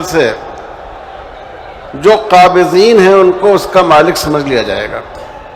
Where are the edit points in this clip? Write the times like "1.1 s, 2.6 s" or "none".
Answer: none